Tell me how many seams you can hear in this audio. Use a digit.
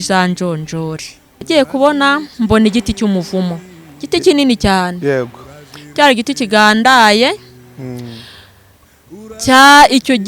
1